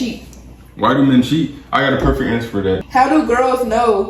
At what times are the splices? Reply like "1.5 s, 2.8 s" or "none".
2.8 s